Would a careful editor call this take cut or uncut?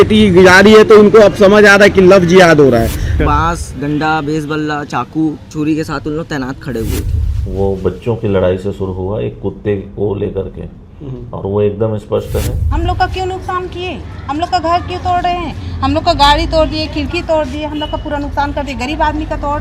cut